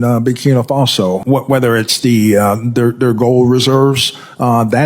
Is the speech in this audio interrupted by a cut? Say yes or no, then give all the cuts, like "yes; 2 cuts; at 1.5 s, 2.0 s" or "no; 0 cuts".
yes; 1 cut; at 1.2 s